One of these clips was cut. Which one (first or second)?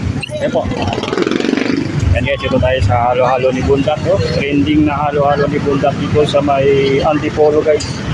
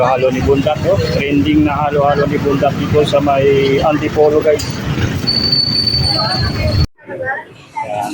second